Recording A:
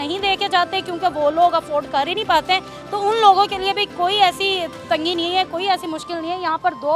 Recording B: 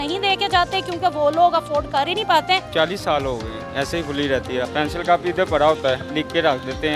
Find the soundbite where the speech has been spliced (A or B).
B